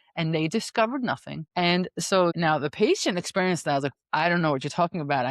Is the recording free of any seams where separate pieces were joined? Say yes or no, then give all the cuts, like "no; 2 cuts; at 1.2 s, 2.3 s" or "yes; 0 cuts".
no; 2 cuts; at 1.3 s, 2.3 s